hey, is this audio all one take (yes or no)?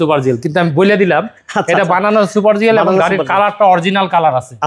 yes